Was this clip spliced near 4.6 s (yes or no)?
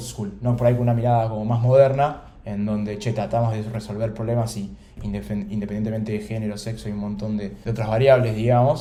no